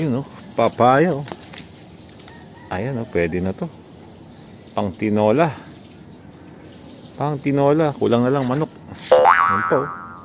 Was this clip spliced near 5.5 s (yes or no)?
no